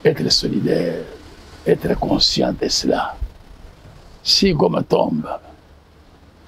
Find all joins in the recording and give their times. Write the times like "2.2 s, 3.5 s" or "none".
none